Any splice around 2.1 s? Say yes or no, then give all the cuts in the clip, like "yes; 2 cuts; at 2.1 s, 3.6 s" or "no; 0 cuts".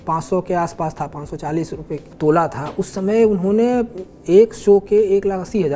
yes; 1 cut; at 2.1 s